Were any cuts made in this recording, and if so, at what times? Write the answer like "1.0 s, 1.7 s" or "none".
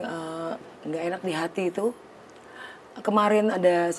1.0 s